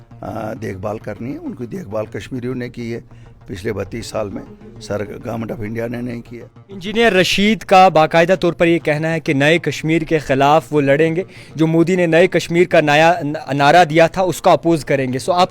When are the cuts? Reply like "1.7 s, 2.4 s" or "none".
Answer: 6.8 s